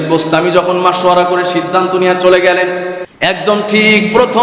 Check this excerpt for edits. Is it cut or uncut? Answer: cut